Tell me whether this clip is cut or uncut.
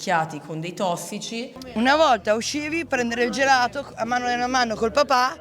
cut